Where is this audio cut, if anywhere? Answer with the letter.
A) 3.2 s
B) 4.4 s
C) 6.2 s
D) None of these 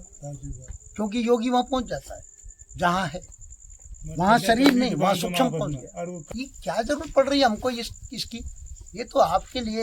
C